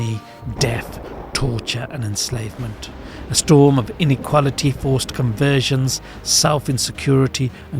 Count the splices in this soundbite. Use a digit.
1